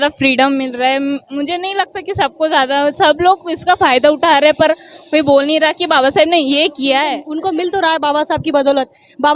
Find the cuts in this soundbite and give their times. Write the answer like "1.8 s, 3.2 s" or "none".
7.3 s